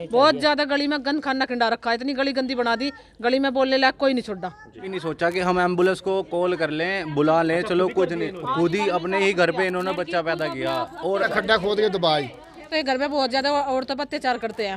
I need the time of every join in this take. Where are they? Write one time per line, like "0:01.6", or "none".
0:04.9
0:11.3
0:12.7